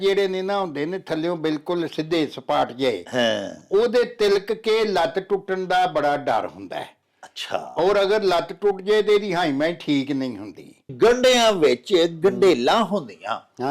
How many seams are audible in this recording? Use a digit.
1